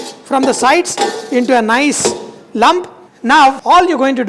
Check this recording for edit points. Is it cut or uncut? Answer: uncut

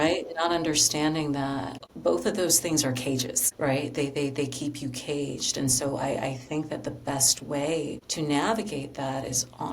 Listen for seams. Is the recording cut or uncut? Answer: cut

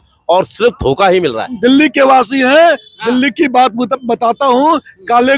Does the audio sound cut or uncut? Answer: cut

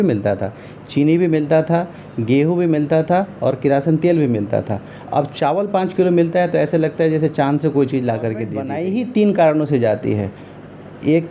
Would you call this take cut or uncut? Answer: cut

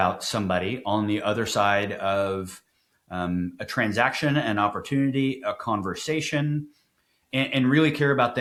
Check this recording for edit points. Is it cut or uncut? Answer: uncut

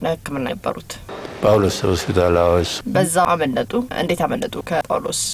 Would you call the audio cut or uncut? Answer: uncut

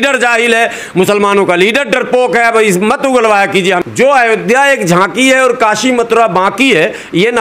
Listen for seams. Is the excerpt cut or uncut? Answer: cut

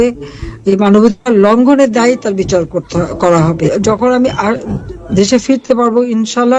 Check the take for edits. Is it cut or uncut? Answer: cut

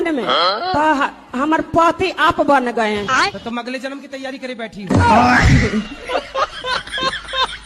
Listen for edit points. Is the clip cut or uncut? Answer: uncut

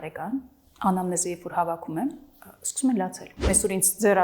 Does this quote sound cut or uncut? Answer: cut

